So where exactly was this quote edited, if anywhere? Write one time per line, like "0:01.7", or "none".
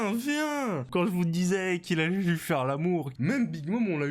0:00.9
0:03.1